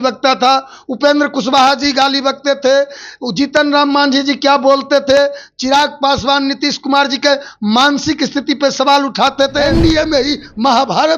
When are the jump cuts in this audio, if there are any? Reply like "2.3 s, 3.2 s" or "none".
9.7 s